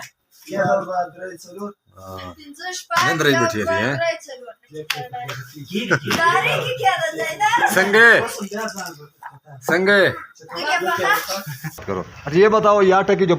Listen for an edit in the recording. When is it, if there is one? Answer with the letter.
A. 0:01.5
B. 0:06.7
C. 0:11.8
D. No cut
C